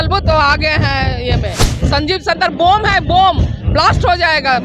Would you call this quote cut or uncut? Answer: uncut